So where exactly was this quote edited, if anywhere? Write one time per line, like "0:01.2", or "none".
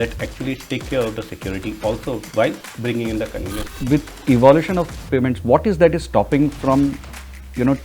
0:03.6